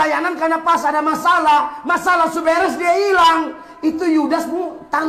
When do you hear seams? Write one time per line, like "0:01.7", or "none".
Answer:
none